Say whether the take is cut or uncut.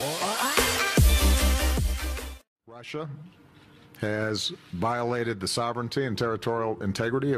cut